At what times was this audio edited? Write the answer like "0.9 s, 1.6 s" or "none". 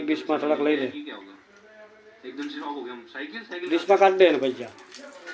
none